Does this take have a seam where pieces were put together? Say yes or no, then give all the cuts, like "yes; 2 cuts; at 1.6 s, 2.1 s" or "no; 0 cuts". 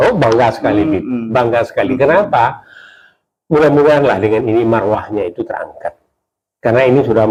no; 0 cuts